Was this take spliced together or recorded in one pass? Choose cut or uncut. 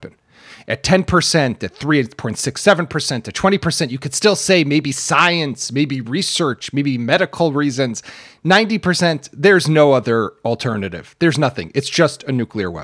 uncut